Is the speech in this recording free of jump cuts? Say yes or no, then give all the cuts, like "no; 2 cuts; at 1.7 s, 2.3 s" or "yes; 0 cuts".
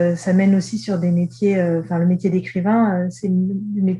yes; 0 cuts